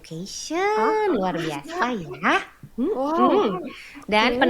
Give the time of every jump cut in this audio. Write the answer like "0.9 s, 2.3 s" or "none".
none